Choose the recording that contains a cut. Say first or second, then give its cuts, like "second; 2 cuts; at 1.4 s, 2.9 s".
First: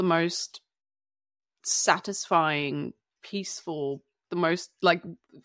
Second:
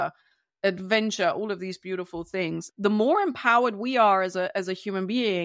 second; 1 cut; at 2.7 s